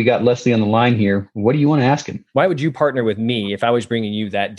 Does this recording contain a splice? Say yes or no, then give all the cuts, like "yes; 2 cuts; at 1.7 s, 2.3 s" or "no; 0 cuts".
yes; 1 cut; at 2.2 s